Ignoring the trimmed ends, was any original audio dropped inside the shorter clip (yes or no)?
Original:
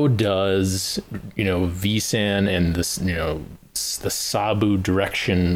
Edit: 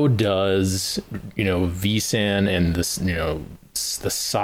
no